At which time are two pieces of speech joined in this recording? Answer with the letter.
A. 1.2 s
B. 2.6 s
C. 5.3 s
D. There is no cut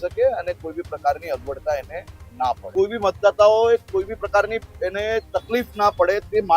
B